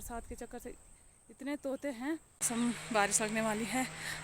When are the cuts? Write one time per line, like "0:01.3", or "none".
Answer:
0:02.4